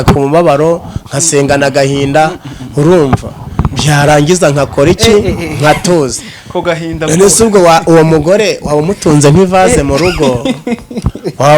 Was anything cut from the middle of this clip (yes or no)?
no